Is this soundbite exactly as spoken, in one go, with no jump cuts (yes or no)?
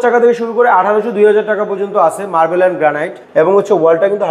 no